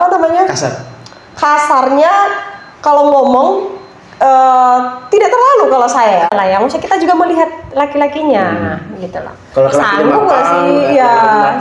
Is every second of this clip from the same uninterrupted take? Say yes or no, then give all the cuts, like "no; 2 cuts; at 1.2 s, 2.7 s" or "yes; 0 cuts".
no; 1 cut; at 6.3 s